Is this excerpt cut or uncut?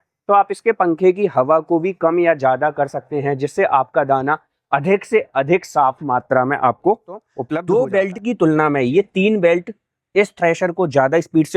cut